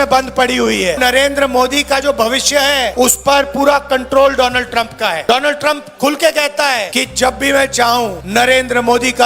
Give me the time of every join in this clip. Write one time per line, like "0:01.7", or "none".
0:01.0
0:02.9
0:05.2
0:06.9
0:08.2